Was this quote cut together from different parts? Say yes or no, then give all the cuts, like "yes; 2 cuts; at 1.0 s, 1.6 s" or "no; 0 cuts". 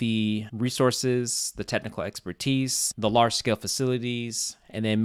no; 0 cuts